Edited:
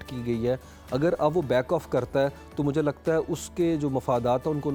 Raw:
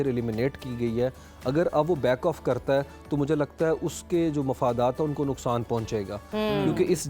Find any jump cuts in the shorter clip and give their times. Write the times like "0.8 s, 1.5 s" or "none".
none